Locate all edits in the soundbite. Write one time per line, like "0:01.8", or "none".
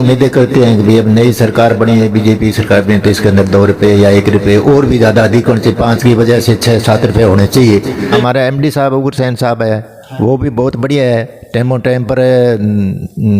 0:08.2